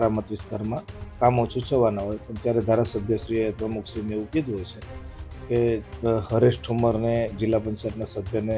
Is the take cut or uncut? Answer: uncut